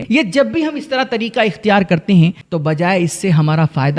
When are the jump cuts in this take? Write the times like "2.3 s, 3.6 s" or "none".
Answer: 2.5 s